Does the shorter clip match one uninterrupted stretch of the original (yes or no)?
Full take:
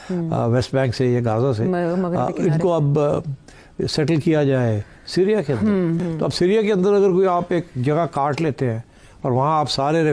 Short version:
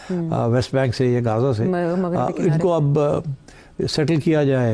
yes